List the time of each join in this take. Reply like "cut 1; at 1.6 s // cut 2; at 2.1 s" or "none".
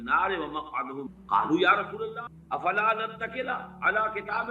cut 1; at 2.3 s